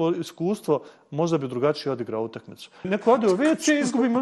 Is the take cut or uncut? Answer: cut